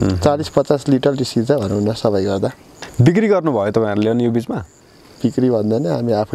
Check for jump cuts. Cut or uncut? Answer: cut